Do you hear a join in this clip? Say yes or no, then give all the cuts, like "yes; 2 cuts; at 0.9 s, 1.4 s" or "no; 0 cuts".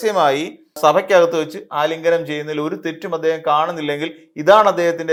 no; 0 cuts